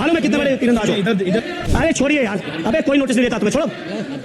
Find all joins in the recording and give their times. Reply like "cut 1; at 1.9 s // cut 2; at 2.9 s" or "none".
cut 1; at 1.5 s